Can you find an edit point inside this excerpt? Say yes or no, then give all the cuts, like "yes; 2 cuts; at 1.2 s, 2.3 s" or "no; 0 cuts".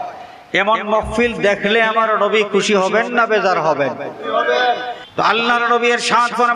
yes; 1 cut; at 5.0 s